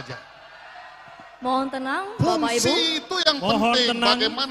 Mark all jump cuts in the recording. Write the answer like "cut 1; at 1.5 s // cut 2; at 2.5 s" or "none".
none